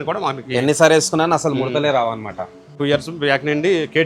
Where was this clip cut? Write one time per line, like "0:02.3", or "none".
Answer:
0:02.7